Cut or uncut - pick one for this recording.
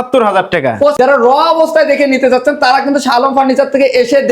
cut